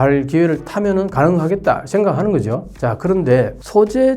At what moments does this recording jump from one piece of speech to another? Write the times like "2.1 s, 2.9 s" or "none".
2.7 s